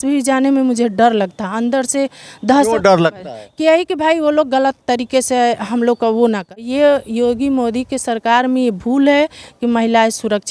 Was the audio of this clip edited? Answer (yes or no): yes